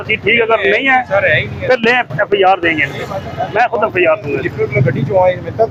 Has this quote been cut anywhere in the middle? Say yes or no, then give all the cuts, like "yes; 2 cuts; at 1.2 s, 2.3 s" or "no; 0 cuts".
no; 0 cuts